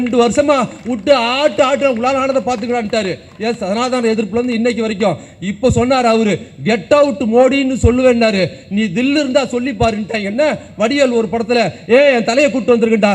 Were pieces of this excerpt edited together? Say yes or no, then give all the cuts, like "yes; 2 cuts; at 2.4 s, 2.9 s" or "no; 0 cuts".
no; 0 cuts